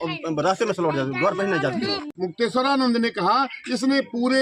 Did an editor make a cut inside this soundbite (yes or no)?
yes